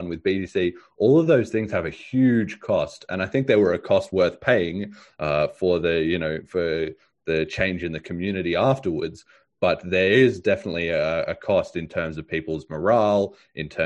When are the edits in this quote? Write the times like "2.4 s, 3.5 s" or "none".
none

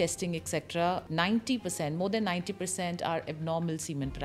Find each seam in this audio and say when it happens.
1.0 s

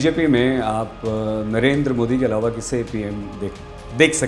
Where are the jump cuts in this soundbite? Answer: none

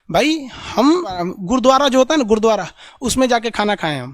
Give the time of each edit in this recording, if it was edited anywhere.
1.3 s

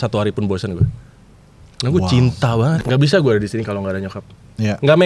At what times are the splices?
2.8 s

